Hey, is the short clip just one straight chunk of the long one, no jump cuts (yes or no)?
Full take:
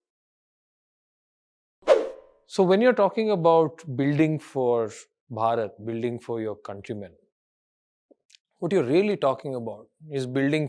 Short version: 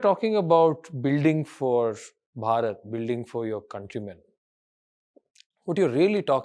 yes